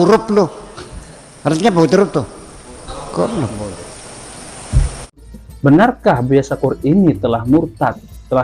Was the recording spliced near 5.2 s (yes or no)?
yes